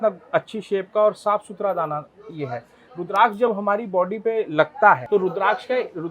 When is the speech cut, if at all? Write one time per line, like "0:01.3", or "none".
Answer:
0:05.0